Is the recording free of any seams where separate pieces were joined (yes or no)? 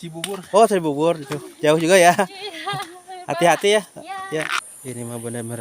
no